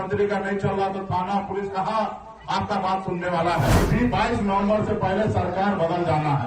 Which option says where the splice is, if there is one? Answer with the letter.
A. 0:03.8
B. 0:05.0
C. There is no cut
A